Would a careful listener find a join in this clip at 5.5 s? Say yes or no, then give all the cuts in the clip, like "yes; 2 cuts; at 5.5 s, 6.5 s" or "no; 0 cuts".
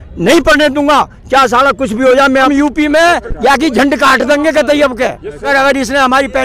yes; 3 cuts; at 2.5 s, 3.3 s, 5.5 s